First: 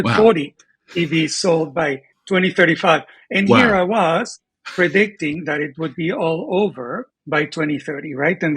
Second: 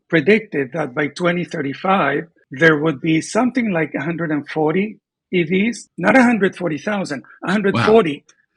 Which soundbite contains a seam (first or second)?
first